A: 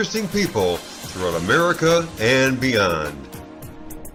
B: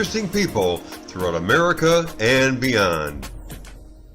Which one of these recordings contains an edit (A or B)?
B